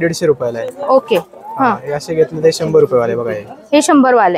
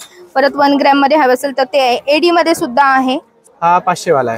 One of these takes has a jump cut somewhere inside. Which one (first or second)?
second